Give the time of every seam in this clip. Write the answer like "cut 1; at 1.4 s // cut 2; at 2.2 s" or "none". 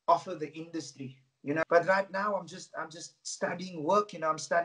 cut 1; at 1.6 s